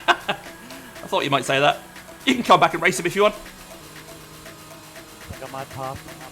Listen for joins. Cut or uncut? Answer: cut